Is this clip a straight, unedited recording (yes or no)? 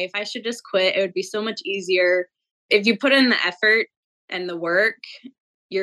no